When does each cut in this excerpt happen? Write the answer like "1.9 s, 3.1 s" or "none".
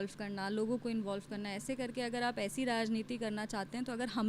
none